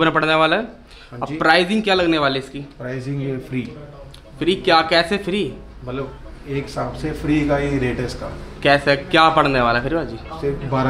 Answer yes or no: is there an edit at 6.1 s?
no